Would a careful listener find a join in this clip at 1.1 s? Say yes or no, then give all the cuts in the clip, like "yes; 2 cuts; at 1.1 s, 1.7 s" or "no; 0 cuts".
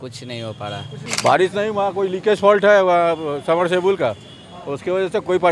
yes; 1 cut; at 1.1 s